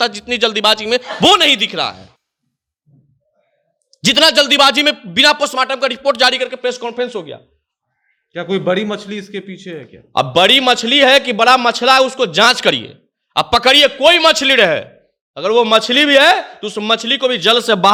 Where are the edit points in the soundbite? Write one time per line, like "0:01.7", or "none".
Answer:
none